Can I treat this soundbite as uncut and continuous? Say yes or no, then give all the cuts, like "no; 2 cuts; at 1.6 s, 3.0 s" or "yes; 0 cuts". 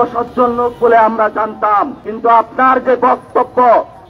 no; 1 cut; at 2.0 s